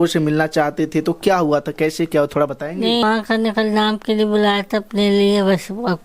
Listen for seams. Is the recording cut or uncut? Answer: cut